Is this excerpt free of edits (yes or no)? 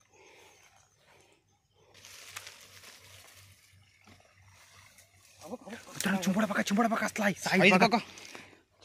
no